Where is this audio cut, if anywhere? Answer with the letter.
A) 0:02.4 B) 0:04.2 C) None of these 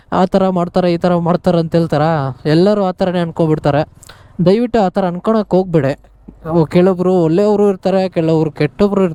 C